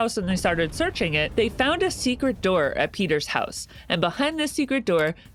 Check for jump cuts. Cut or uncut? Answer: uncut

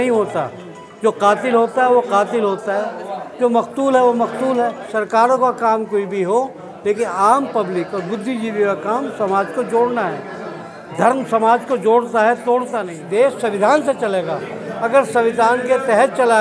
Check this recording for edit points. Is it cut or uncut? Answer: cut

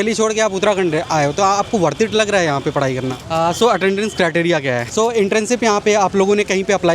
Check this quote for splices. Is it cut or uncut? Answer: cut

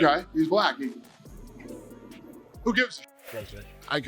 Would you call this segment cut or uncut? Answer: cut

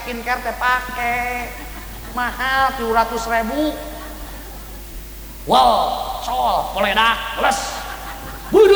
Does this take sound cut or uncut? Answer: uncut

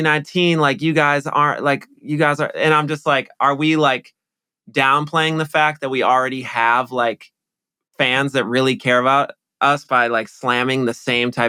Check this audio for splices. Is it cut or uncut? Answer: uncut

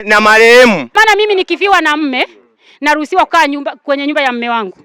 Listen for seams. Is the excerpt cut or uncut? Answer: cut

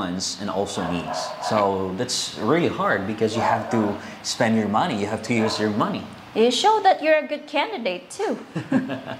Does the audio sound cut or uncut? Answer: uncut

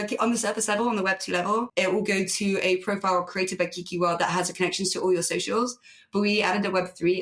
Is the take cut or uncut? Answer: cut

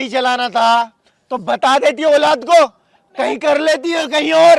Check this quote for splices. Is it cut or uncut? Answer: uncut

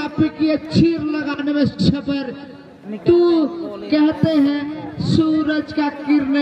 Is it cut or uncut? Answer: uncut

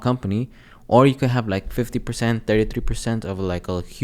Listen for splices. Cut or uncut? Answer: uncut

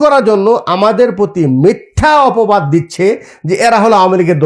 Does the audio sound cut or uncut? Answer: uncut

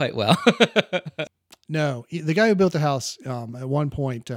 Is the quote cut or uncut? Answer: cut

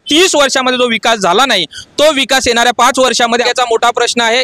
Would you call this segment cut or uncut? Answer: cut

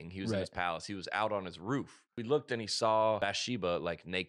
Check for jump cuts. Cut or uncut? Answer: cut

